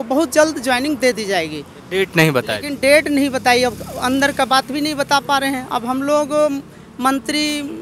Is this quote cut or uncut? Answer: uncut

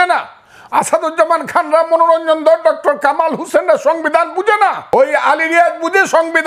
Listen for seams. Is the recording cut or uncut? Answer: cut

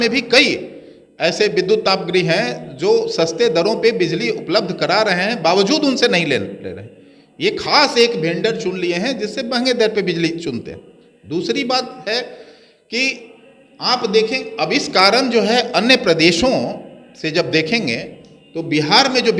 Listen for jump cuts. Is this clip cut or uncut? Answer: uncut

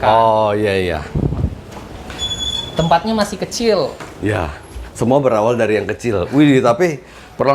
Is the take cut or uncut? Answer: uncut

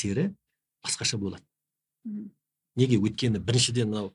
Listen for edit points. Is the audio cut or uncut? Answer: uncut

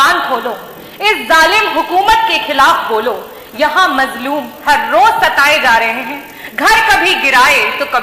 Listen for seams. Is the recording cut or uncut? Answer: uncut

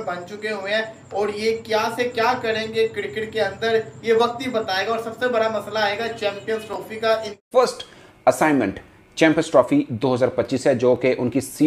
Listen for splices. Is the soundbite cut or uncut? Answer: cut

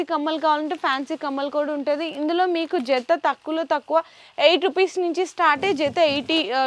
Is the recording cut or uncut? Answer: uncut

